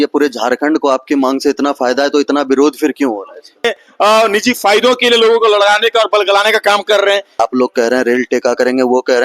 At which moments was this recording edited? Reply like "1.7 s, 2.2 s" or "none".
3.7 s, 7.4 s